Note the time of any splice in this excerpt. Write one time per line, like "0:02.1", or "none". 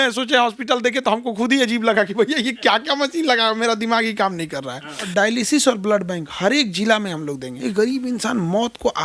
0:05.0
0:07.5